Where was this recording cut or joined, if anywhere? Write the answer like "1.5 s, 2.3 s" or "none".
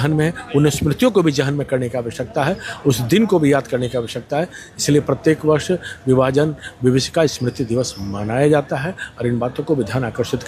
none